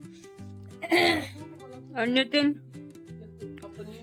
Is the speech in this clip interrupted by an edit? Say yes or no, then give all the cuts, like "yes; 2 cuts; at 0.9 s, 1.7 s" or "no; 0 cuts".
no; 0 cuts